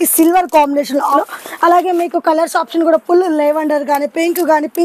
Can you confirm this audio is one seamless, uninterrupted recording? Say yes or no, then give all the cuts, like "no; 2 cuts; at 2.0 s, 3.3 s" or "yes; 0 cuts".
no; 1 cut; at 1.2 s